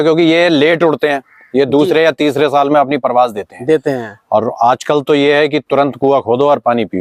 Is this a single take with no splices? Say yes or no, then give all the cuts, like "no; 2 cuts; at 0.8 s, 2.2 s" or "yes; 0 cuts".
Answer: yes; 0 cuts